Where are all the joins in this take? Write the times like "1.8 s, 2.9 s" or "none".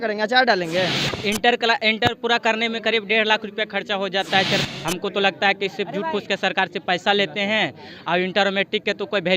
1.1 s, 4.6 s